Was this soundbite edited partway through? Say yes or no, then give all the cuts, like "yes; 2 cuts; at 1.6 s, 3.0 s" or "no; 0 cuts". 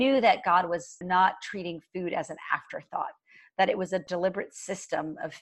yes; 2 cuts; at 0.9 s, 4.0 s